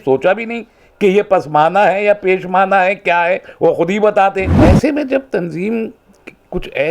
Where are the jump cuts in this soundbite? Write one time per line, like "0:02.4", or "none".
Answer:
0:04.5